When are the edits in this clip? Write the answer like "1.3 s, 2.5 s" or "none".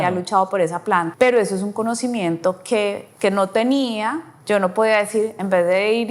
1.1 s, 3.1 s, 4.3 s